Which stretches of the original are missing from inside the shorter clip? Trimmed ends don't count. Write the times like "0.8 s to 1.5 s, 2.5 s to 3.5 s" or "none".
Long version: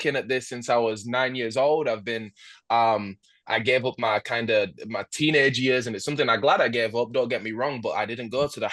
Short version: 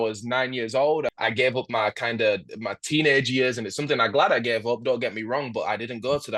2.0 s to 3.4 s